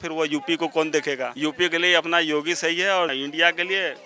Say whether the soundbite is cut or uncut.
cut